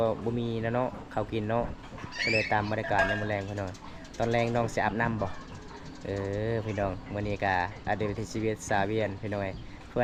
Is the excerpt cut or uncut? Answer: uncut